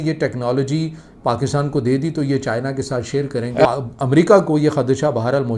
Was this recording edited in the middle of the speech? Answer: yes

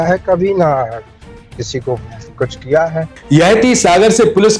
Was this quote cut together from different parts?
yes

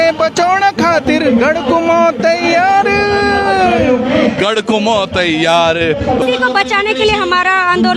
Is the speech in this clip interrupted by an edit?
yes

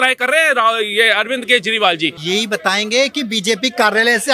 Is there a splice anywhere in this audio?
yes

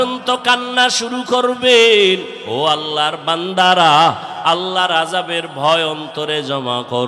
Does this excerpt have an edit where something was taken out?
yes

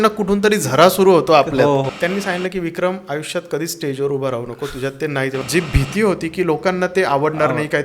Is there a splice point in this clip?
yes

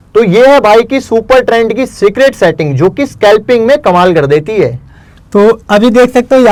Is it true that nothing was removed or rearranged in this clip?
yes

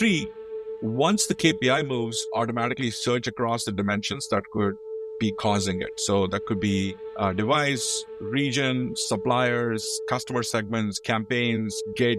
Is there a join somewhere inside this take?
yes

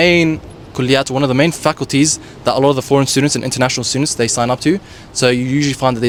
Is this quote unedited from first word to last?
yes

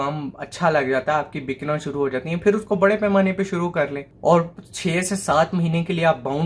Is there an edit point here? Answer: yes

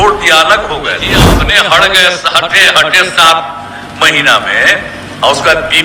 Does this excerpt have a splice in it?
yes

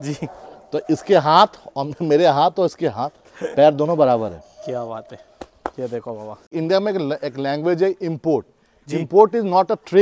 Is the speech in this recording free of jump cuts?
no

